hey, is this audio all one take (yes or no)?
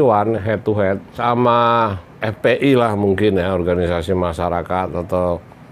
no